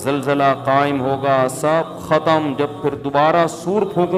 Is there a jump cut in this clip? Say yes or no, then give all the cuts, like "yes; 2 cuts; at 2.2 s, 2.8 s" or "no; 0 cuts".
no; 0 cuts